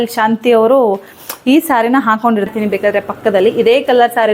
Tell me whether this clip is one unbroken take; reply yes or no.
no